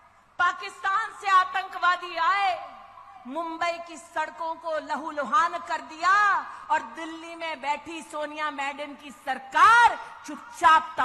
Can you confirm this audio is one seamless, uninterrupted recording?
yes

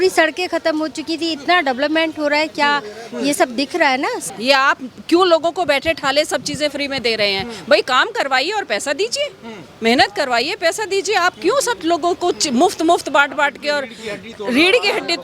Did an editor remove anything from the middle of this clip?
yes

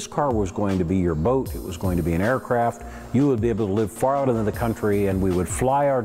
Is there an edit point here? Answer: no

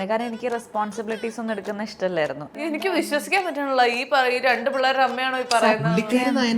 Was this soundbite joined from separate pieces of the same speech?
yes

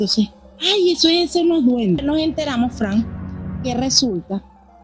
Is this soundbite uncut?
no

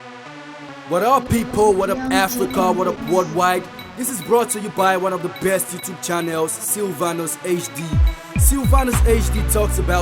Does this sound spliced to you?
no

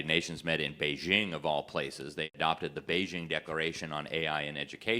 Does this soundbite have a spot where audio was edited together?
yes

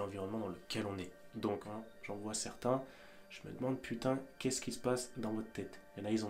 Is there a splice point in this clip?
yes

